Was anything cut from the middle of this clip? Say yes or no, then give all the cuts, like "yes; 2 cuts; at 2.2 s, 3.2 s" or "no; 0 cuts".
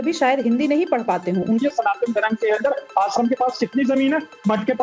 yes; 1 cut; at 1.6 s